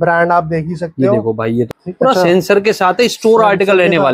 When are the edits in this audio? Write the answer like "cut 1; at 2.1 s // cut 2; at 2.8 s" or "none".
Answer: cut 1; at 1.7 s